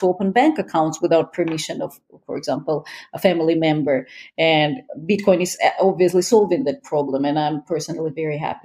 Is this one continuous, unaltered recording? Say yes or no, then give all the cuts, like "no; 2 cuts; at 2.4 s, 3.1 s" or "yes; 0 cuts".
yes; 0 cuts